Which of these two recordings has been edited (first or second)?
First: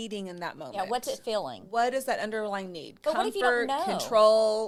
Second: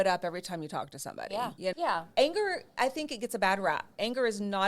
second